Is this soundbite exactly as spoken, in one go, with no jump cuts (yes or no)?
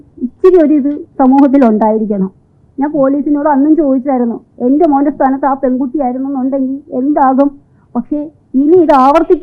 yes